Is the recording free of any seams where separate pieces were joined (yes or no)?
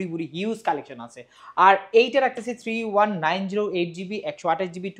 yes